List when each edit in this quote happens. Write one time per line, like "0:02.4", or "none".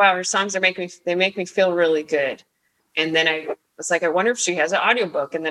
0:02.8